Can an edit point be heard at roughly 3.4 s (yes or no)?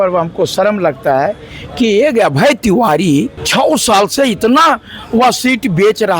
yes